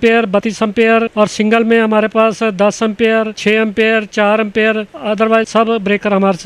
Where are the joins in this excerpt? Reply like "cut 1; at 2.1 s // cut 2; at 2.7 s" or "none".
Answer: none